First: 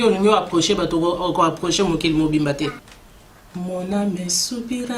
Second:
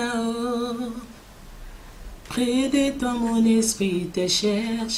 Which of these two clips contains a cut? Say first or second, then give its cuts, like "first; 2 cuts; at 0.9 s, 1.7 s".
first; 1 cut; at 2.9 s